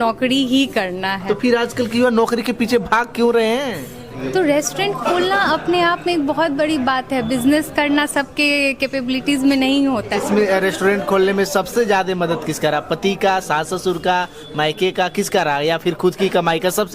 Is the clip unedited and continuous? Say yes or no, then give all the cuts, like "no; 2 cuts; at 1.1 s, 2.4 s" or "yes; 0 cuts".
no; 2 cuts; at 4.2 s, 10.2 s